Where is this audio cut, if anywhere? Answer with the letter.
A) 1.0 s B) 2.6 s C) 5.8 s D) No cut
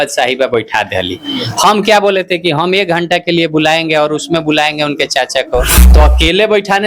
C